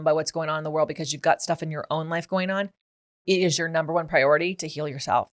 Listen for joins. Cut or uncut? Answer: uncut